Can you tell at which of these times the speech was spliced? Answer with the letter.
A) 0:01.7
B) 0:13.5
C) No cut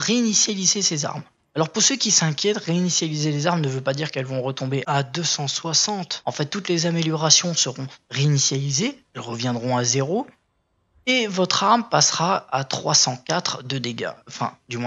A